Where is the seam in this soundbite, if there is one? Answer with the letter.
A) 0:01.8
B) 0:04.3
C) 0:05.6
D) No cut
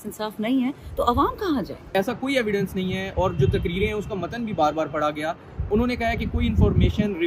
A